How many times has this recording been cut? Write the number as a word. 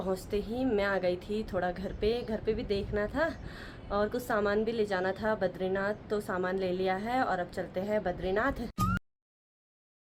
zero